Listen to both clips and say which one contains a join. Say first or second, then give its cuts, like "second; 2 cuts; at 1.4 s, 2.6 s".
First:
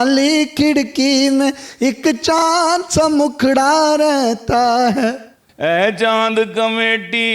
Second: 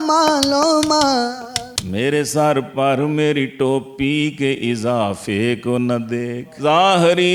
first; 1 cut; at 5.4 s